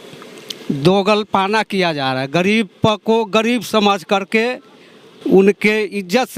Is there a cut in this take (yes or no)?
no